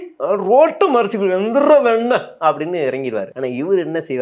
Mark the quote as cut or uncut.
cut